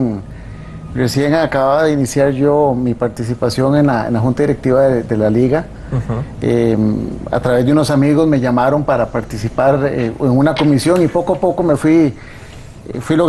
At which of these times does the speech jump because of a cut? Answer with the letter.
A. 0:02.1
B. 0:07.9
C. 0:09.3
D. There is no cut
C